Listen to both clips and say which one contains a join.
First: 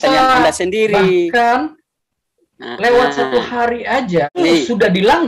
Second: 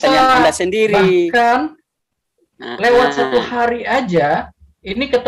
first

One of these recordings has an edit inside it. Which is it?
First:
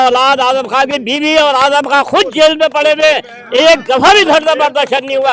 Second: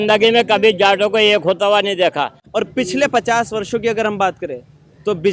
second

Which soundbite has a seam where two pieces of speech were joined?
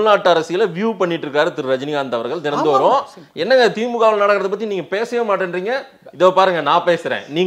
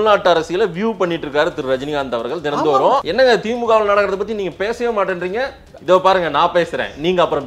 second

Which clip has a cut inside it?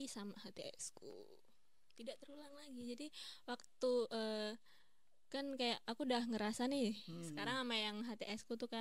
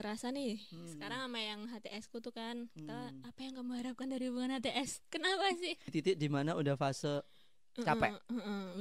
second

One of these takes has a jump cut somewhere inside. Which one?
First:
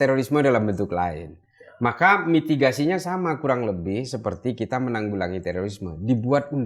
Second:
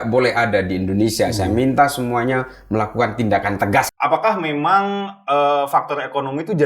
second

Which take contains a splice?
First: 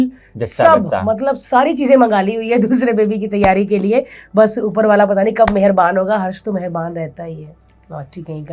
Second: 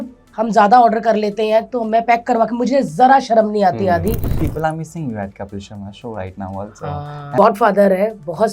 second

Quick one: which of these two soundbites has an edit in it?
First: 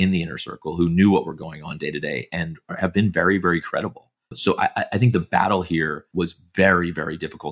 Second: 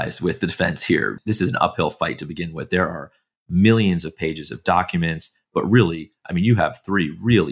second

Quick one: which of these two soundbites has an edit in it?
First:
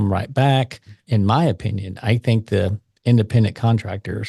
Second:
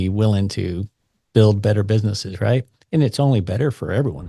first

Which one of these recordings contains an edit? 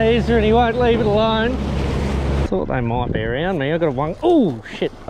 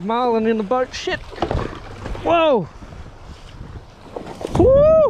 first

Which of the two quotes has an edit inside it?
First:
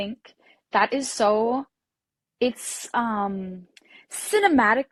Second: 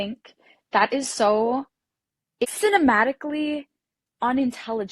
second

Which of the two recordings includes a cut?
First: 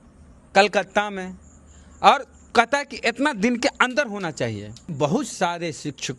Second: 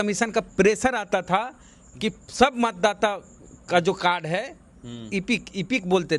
first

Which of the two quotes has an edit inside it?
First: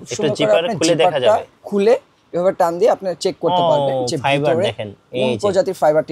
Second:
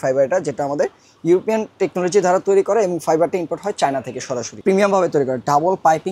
second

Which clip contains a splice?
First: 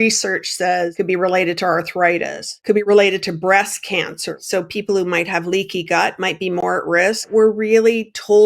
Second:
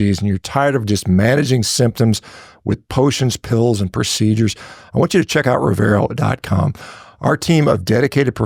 first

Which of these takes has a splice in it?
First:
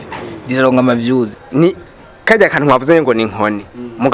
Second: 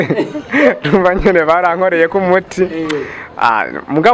first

